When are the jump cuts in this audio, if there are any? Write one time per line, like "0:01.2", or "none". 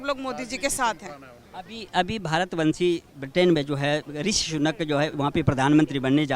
none